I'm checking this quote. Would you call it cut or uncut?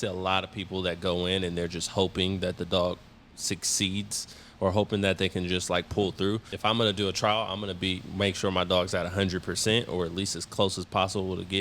cut